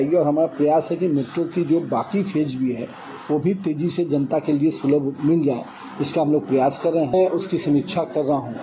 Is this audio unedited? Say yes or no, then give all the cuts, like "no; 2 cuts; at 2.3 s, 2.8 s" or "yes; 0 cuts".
no; 1 cut; at 7.1 s